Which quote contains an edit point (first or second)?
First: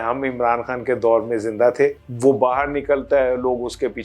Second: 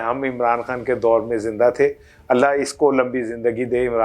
first